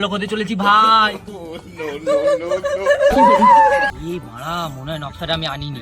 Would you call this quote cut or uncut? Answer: cut